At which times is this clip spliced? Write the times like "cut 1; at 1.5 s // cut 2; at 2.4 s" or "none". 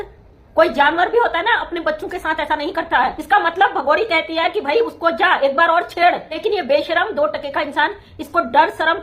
cut 1; at 3.2 s // cut 2; at 6.3 s